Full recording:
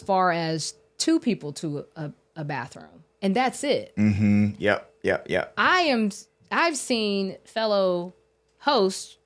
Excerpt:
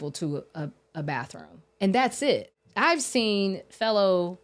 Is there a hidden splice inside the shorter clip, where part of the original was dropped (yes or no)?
yes